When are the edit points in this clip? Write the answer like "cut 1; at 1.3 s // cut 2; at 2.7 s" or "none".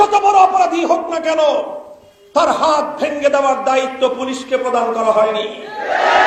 none